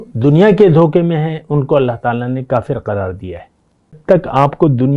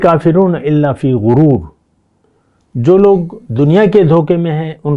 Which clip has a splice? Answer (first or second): first